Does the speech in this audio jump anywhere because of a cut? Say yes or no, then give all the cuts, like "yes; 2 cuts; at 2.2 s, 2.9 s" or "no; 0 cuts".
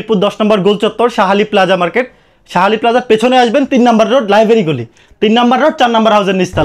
no; 0 cuts